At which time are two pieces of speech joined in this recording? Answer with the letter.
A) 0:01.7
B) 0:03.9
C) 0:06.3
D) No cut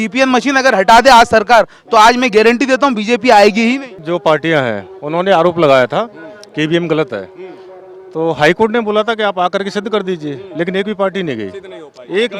B